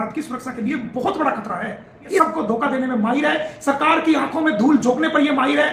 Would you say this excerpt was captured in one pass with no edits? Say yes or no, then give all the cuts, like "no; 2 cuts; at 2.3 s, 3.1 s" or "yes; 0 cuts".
no; 1 cut; at 2.2 s